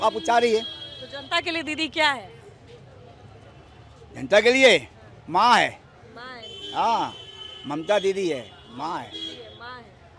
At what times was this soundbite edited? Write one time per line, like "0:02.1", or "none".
none